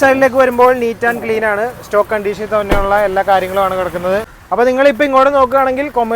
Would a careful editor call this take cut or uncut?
cut